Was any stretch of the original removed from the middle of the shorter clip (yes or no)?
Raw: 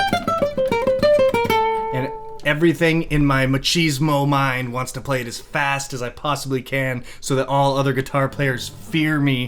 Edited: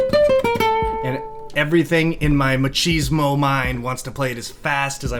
no